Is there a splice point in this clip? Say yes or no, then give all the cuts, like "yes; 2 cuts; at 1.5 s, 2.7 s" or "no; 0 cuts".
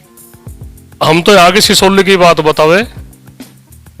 yes; 1 cut; at 0.9 s